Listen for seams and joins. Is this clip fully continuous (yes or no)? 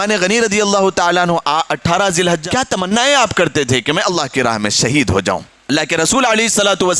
no